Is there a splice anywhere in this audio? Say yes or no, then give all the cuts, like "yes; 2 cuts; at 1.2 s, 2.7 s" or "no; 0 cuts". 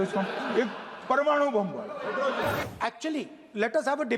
yes; 1 cut; at 2.6 s